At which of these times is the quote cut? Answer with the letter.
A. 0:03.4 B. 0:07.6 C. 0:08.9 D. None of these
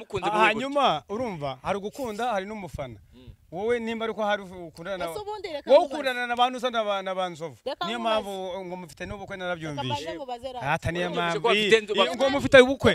D